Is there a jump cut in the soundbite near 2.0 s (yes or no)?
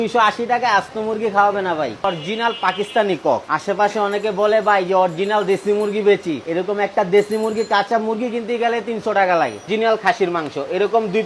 yes